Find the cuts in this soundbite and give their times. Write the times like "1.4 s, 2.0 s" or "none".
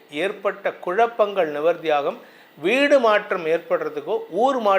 none